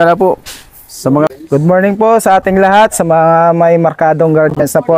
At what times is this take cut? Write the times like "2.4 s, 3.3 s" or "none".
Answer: 1.3 s